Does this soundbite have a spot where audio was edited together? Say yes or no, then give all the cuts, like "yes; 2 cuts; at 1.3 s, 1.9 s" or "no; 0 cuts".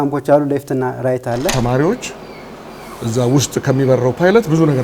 yes; 1 cut; at 1.5 s